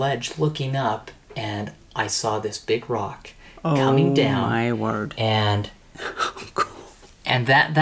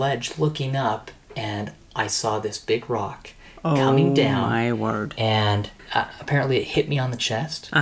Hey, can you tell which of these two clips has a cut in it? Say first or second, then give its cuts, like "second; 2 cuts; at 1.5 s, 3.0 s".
second; 1 cut; at 5.8 s